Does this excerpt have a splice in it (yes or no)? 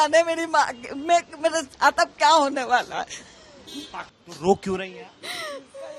yes